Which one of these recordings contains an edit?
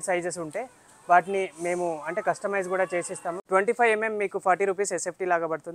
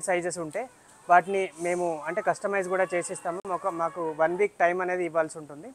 first; 1 cut; at 3.3 s

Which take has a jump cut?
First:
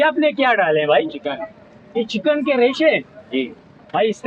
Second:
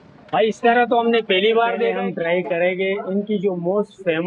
second; 1 cut; at 1.9 s

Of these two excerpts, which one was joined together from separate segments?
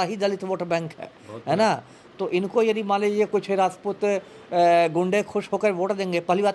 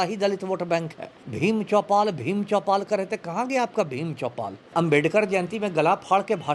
second; 2 cuts; at 1.2 s, 4.7 s

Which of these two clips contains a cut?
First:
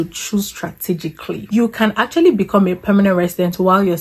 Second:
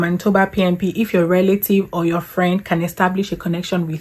first; 1 cut; at 1.4 s

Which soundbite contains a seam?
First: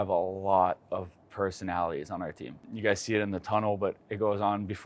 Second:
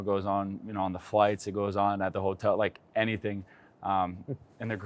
first; 1 cut; at 2.6 s

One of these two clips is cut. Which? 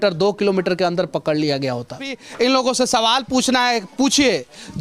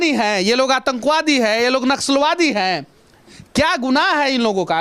first; 1 cut; at 2.2 s

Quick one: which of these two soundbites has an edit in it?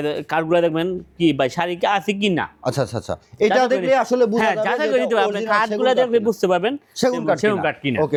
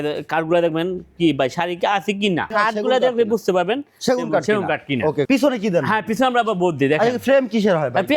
second; 2 cuts; at 2.5 s, 5.3 s

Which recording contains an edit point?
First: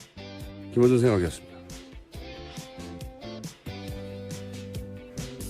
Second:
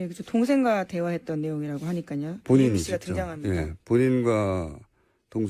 first; 1 cut; at 1.0 s

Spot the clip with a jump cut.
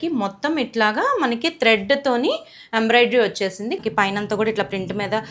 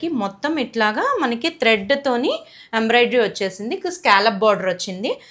first; 1 cut; at 3.8 s

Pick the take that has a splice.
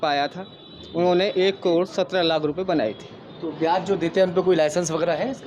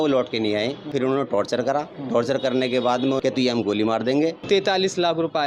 second; 3 cuts; at 0.9 s, 3.2 s, 4.4 s

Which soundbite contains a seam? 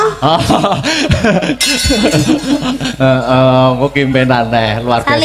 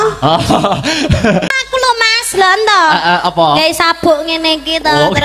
second; 1 cut; at 1.6 s

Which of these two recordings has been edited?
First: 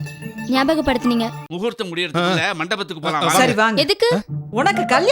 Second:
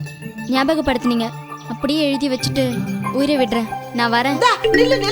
first; 1 cut; at 1.4 s

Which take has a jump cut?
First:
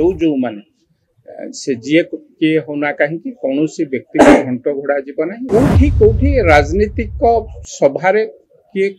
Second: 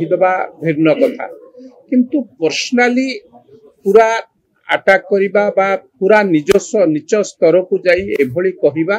first; 1 cut; at 5.4 s

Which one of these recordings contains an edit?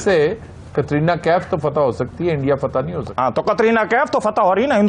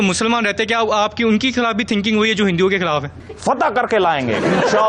second; 1 cut; at 3.1 s

